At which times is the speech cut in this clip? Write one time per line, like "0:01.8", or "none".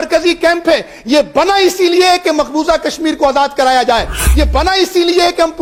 none